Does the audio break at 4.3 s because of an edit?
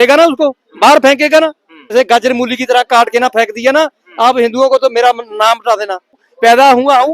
no; 2 cuts; at 1.9 s, 6.2 s

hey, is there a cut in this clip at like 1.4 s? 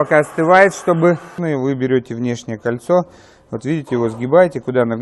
yes; 1 cut; at 1.4 s

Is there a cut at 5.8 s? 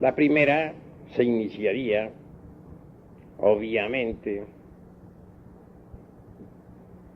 no; 1 cut; at 2.0 s

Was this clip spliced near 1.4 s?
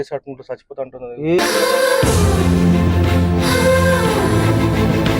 yes; 1 cut; at 1.4 s

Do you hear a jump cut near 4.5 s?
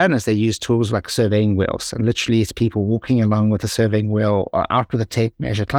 no; 0 cuts

